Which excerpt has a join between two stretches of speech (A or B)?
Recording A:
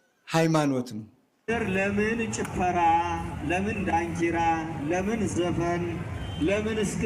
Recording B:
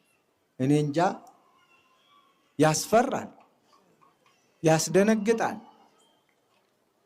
A